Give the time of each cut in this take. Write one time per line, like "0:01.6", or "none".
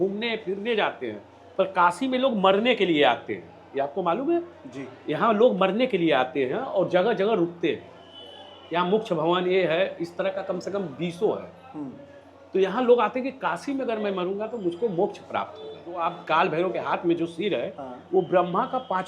0:16.0